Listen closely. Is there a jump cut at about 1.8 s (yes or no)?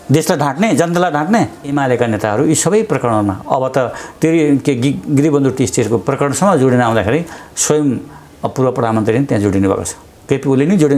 yes